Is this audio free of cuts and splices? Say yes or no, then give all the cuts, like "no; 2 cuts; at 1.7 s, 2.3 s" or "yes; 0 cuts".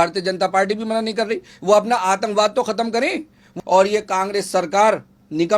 no; 1 cut; at 3.5 s